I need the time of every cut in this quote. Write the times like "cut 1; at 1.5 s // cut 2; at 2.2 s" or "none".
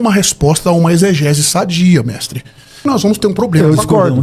cut 1; at 2.8 s